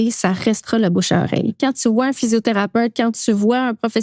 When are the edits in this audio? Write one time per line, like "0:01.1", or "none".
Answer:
0:01.6